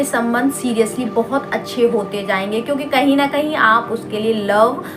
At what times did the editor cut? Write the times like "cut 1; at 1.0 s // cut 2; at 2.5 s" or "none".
none